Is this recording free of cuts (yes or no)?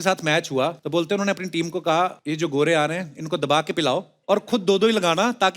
no